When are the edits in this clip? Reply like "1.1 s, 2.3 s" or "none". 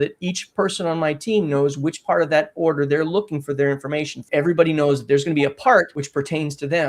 4.1 s, 6.0 s